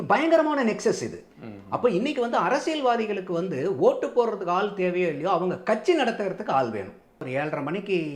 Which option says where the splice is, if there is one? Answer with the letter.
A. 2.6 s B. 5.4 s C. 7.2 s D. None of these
C